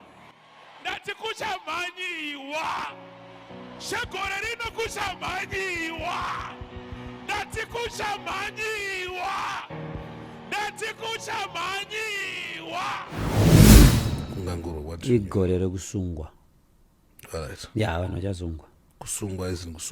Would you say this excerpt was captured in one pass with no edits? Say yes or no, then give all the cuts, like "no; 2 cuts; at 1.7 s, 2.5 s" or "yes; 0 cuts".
no; 2 cuts; at 13.1 s, 13.9 s